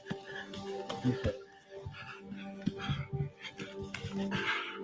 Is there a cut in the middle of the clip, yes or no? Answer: no